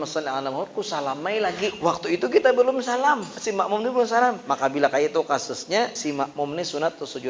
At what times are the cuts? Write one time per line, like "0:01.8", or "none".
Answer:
0:01.8
0:03.4
0:04.4
0:06.0